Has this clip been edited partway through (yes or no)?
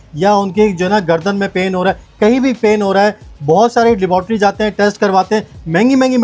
no